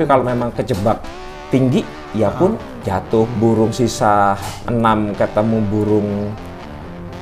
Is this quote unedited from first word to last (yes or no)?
no